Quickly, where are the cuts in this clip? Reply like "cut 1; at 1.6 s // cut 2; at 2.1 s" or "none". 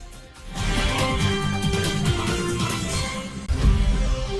cut 1; at 3.5 s